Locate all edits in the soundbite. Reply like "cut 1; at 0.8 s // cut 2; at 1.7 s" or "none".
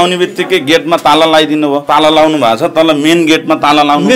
cut 1; at 1.8 s